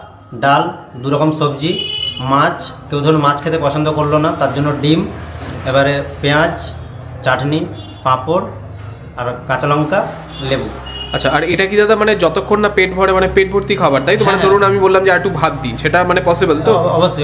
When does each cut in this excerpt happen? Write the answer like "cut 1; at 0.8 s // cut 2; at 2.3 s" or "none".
none